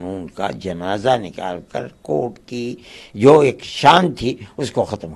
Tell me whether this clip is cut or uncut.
uncut